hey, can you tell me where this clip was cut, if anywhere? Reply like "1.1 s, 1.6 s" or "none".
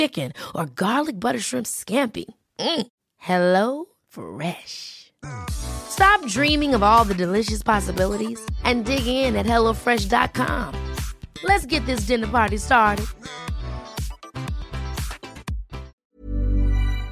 16.0 s

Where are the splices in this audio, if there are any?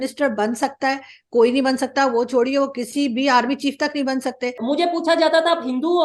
4.6 s

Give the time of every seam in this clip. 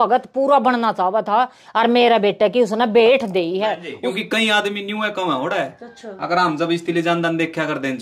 4.0 s

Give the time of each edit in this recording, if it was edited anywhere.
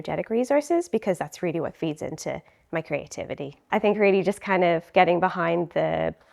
3.6 s

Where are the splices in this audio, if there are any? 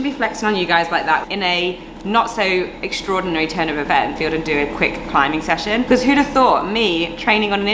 1.3 s, 4.2 s

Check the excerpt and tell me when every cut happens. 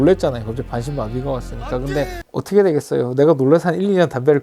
2.2 s

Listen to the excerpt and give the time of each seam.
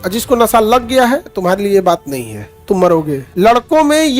3.2 s

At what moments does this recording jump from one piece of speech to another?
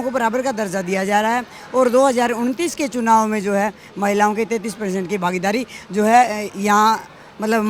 none

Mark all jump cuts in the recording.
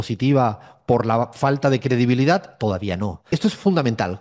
3.2 s

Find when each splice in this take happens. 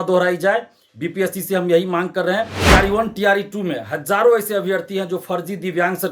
2.6 s

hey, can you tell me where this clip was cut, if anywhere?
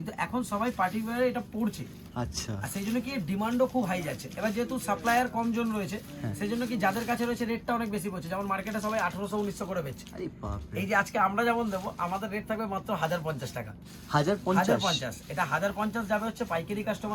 none

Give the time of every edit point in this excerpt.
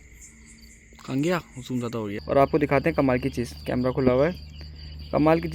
2.1 s

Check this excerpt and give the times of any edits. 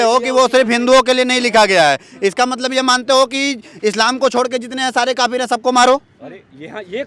none

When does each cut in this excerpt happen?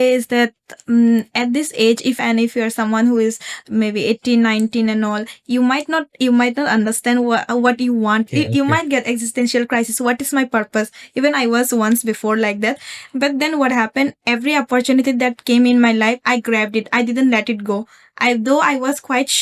2.2 s, 8.3 s

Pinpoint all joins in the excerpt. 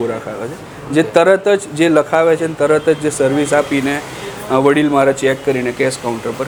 none

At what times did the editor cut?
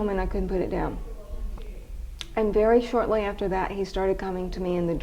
none

